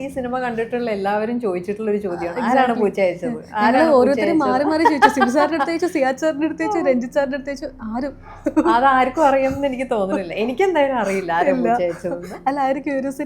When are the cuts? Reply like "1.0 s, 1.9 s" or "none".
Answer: none